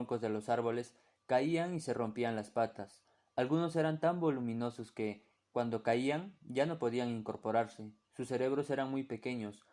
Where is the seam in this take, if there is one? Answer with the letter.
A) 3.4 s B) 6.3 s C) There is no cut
C